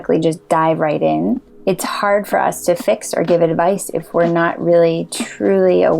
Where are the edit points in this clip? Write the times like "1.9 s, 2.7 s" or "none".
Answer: 1.5 s